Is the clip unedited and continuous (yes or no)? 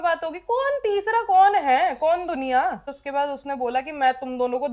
no